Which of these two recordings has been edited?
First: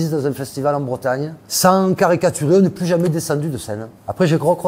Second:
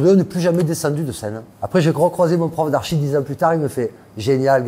first; 1 cut; at 1.5 s

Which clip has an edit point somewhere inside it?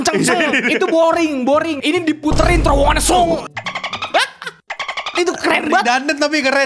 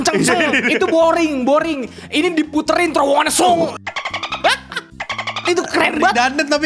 first; 1 cut; at 1.7 s

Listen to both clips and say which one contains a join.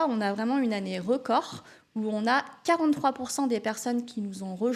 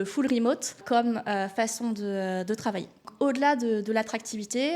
second; 2 cuts; at 0.8 s, 3.1 s

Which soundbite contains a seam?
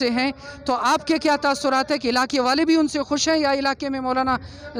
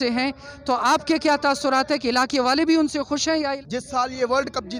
second; 1 cut; at 3.6 s

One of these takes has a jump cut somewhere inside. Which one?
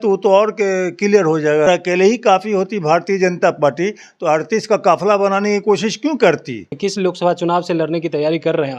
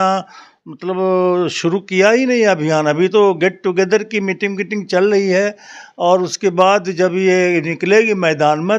first; 2 cuts; at 1.7 s, 6.7 s

